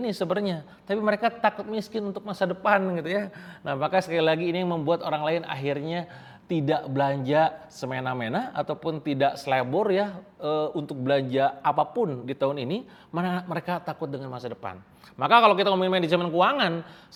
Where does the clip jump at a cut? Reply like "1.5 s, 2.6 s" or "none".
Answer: none